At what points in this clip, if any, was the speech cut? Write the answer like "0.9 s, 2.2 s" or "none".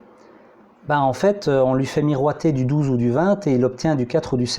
none